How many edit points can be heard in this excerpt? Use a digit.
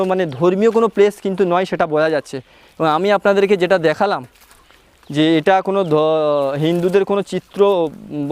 0